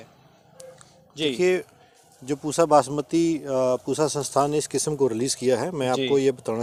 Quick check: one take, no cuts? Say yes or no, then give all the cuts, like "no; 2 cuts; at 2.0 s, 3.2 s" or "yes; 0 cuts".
yes; 0 cuts